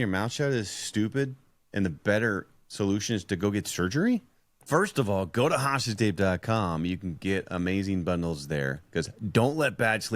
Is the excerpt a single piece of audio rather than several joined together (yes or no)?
no